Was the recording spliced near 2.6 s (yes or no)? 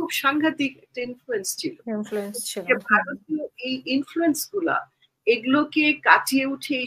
no